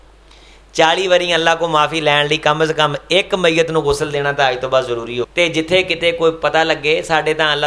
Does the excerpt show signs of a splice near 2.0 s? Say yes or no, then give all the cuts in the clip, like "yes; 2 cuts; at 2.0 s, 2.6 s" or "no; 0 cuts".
no; 1 cut; at 5.3 s